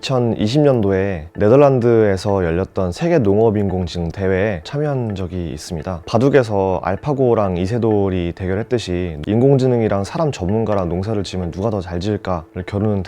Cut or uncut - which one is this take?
cut